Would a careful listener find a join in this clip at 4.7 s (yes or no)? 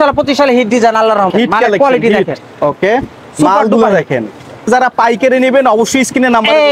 yes